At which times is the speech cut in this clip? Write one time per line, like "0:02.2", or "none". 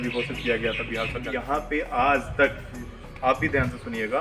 0:01.3